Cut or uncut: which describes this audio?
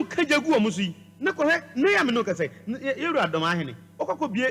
uncut